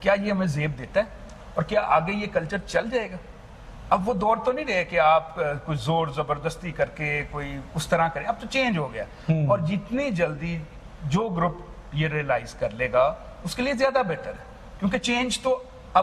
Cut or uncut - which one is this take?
uncut